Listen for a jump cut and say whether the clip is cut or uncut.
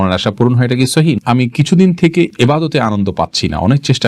cut